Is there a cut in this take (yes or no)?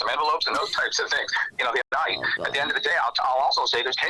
yes